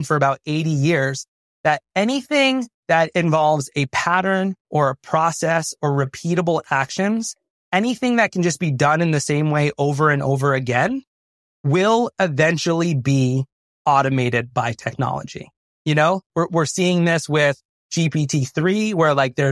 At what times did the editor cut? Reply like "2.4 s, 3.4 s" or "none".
3.1 s